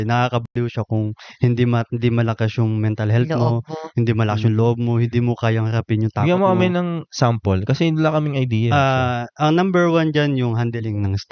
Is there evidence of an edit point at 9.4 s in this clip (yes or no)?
no